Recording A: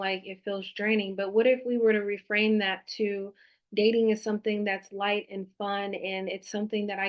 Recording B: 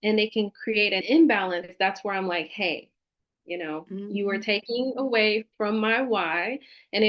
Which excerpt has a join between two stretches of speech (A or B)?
B